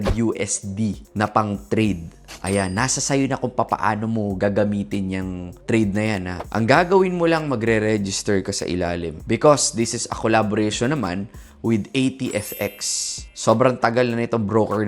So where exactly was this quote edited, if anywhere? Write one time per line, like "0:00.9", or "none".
0:06.4
0:09.2